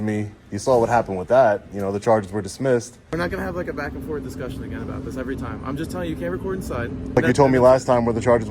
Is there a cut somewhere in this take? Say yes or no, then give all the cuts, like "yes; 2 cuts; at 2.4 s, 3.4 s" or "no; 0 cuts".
yes; 2 cuts; at 3.0 s, 7.2 s